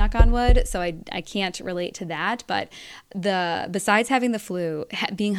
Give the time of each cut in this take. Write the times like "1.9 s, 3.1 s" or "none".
none